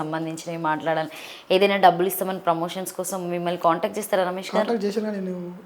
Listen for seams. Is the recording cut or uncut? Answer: uncut